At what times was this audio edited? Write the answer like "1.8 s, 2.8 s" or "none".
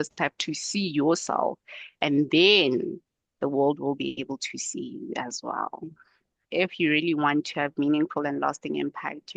6.4 s